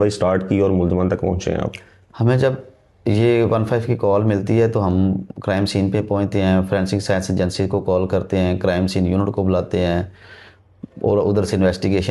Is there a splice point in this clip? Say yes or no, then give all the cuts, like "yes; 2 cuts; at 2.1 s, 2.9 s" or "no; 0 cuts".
no; 0 cuts